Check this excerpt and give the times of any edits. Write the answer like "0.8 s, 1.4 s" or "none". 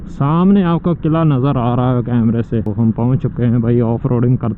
2.7 s

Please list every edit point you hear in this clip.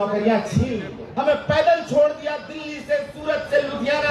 1.1 s

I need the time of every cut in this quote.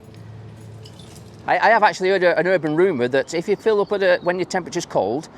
1.3 s

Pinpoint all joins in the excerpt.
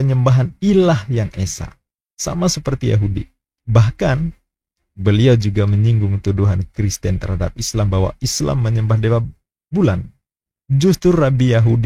none

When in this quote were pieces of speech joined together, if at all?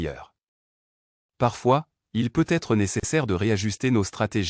none

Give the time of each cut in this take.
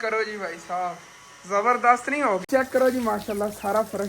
2.4 s

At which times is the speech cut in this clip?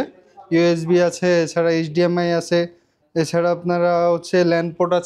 none

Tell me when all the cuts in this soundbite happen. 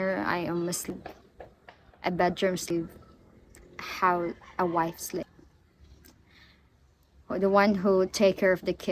0.9 s, 2.7 s, 5.2 s

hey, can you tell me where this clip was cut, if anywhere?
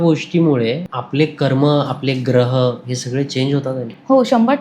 0.9 s

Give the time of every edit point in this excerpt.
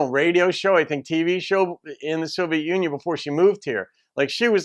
none

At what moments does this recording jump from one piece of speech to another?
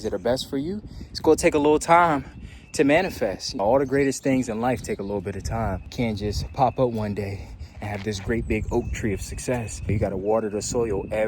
3.5 s, 5.8 s, 9.9 s

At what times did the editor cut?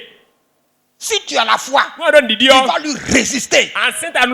none

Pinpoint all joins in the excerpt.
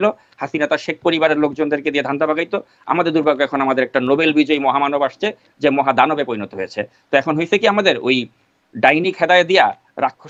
none

